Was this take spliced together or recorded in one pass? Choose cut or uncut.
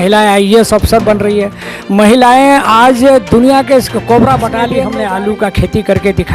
cut